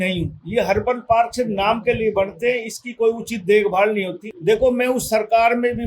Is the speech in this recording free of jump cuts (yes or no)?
no